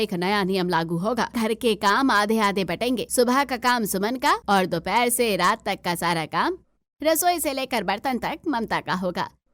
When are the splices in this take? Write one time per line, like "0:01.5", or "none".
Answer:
0:01.3
0:03.1
0:04.4